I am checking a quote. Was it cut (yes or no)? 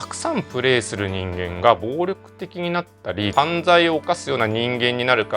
no